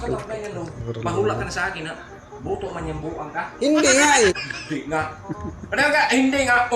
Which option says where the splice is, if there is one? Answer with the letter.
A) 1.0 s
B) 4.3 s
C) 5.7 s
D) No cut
B